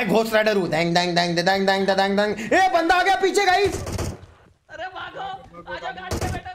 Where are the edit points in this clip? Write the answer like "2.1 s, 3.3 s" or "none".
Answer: none